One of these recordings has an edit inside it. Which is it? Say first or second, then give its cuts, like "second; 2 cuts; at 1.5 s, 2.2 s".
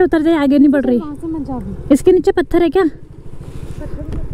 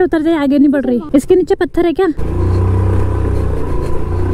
second; 2 cuts; at 1.0 s, 2.2 s